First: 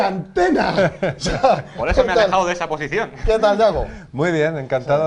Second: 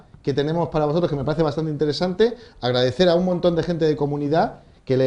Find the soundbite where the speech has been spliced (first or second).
first